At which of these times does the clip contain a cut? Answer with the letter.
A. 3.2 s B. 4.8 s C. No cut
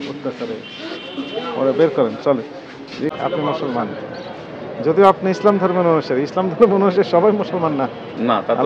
A